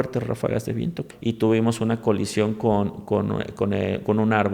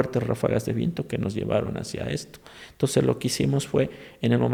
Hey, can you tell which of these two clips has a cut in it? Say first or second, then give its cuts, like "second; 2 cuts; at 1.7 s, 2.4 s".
first; 1 cut; at 1.1 s